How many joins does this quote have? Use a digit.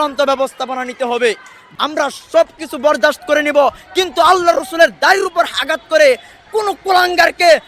1